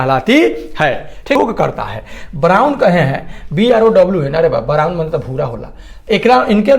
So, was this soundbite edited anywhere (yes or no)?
yes